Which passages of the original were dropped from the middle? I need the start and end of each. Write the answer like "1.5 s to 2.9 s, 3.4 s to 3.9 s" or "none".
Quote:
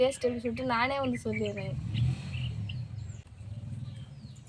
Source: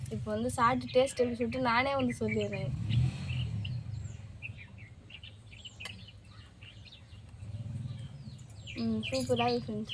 4.3 s to 7.4 s